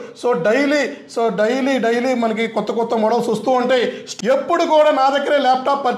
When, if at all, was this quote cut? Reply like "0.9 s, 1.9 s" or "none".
4.1 s